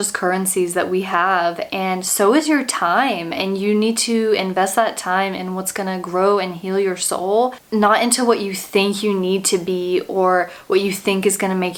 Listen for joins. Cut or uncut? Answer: uncut